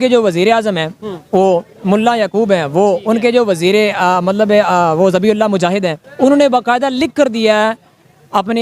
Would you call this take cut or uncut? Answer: cut